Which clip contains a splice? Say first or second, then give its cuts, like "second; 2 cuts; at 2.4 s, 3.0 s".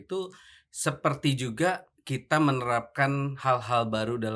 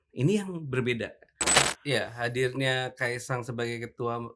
second; 1 cut; at 1.7 s